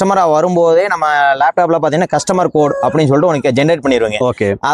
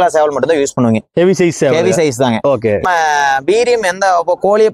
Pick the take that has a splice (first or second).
second